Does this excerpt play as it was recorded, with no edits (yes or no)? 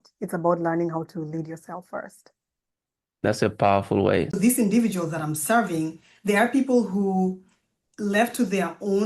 no